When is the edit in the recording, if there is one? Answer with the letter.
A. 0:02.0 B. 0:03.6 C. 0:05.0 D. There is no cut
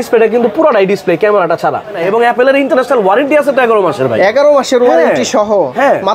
A